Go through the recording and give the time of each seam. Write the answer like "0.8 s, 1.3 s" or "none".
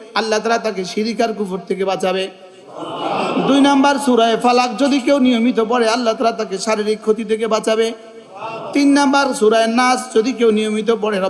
none